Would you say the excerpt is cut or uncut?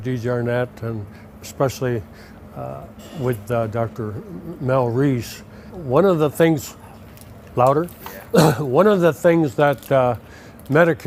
uncut